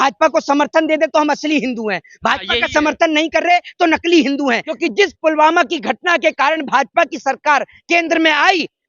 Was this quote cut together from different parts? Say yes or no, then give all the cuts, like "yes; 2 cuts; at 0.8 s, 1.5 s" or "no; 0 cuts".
yes; 1 cut; at 4.7 s